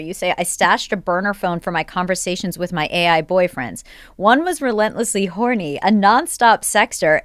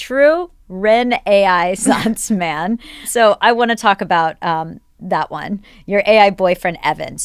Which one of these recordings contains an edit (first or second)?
second